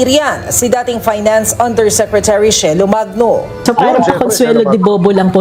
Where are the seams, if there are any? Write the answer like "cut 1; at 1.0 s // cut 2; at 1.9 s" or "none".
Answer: none